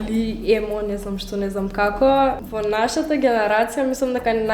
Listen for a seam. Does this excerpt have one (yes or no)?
yes